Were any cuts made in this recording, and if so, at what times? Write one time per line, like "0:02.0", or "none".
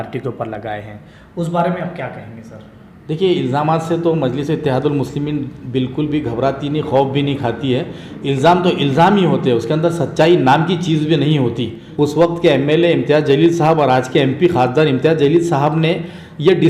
0:11.8